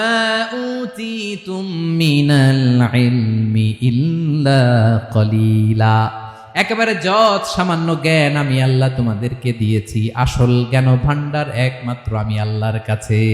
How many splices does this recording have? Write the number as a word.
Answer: zero